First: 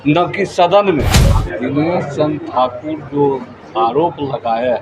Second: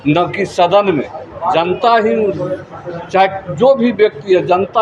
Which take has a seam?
first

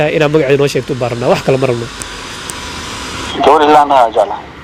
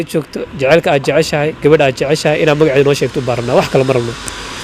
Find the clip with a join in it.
first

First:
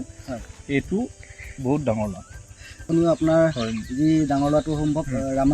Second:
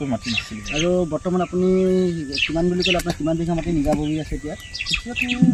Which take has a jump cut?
first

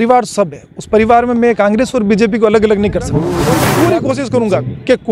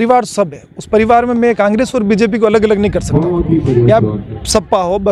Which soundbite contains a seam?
first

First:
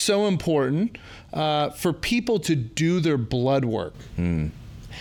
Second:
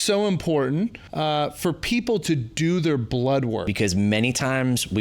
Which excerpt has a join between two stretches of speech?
second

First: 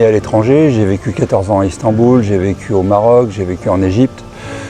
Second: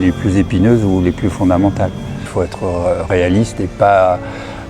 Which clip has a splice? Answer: second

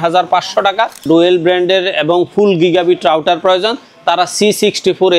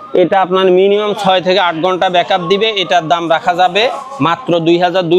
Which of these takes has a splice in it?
first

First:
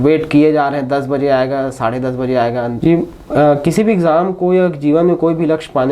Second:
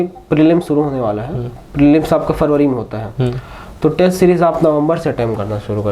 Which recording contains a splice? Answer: first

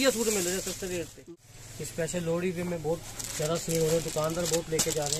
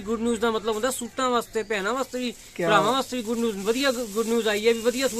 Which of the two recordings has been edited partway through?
first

